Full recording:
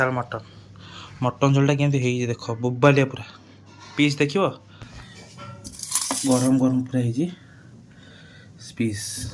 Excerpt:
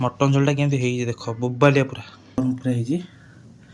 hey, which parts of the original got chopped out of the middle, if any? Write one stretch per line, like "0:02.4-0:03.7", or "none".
0:03.6-0:06.7